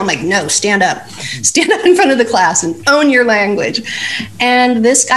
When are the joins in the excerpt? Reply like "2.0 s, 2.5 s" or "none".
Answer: none

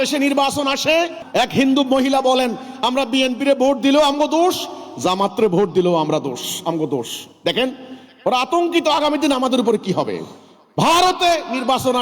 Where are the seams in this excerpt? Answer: 1.2 s

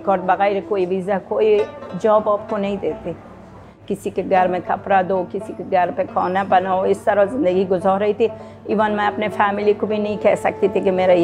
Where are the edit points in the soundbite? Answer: 3.9 s

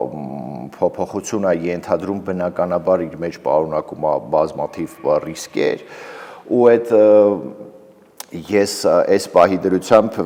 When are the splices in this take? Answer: none

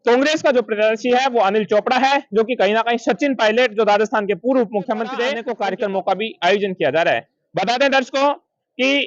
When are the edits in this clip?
5.5 s

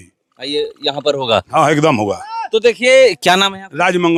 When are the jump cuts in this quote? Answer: none

